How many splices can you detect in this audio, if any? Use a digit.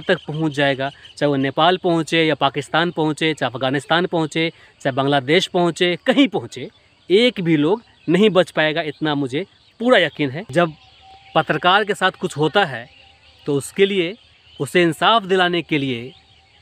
1